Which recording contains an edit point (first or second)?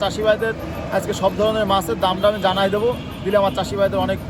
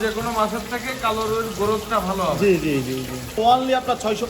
second